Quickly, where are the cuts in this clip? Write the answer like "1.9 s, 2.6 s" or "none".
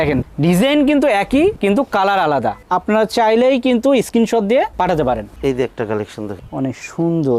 none